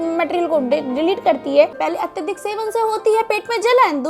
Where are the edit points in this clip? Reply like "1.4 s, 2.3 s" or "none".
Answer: 1.8 s